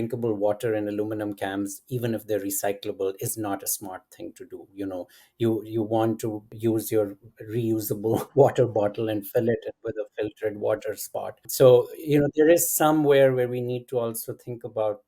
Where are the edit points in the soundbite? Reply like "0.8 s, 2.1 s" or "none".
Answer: 6.5 s, 11.5 s